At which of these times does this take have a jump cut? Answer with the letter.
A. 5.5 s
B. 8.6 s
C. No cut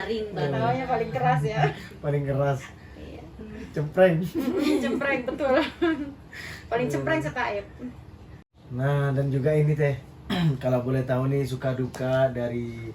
C